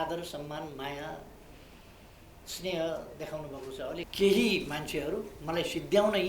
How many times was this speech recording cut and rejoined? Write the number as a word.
one